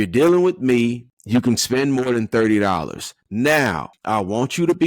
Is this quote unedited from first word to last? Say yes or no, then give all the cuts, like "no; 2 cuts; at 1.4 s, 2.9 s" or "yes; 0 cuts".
no; 2 cuts; at 1.1 s, 3.9 s